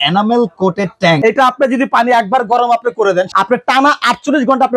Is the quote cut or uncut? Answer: cut